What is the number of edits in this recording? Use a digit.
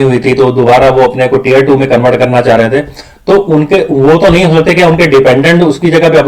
0